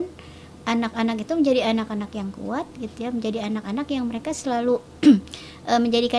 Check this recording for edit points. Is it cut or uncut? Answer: uncut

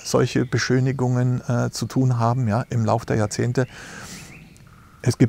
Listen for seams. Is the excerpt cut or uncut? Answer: uncut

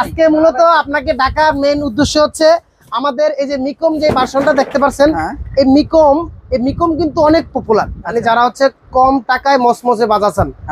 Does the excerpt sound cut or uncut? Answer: cut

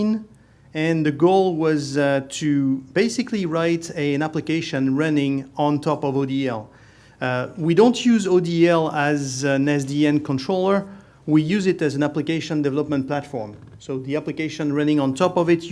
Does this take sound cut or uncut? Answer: cut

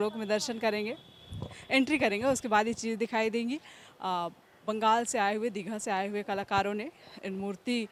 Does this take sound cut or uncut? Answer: uncut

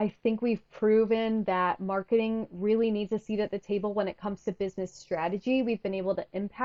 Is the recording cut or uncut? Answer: uncut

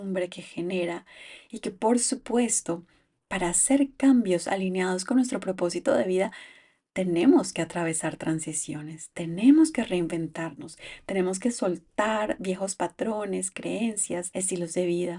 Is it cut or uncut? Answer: cut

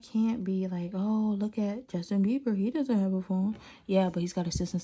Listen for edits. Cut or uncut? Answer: uncut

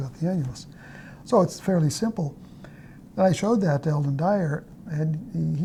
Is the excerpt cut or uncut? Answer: uncut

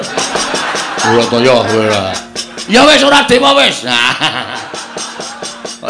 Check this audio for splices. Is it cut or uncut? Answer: uncut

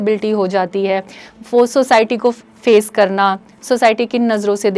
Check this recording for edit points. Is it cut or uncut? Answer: uncut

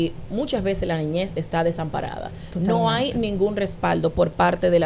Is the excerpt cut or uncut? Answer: uncut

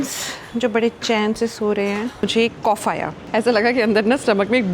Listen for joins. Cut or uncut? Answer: cut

